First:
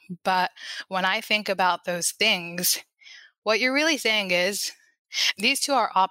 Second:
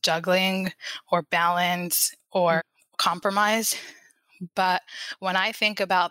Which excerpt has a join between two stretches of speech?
second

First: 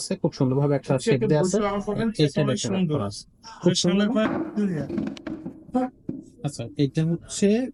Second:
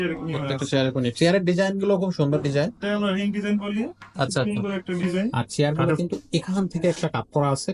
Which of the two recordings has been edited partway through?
second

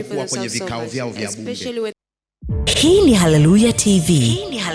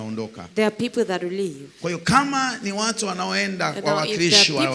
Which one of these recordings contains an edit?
first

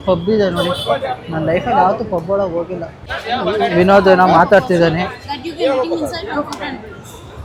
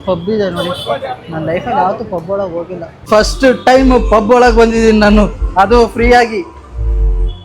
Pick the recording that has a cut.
second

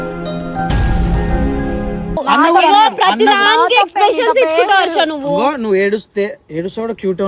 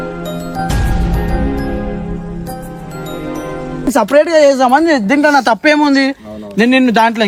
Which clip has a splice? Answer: first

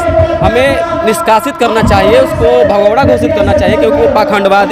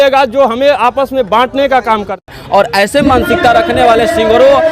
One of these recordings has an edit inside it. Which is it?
second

